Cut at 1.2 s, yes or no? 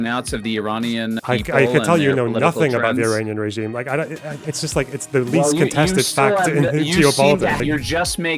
yes